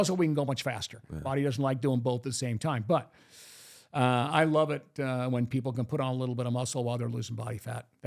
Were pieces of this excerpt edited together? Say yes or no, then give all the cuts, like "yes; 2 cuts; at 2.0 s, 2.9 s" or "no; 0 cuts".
no; 0 cuts